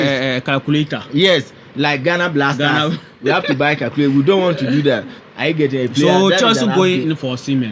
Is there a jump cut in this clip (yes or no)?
yes